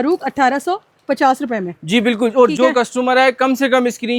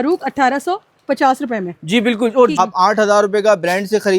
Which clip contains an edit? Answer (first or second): second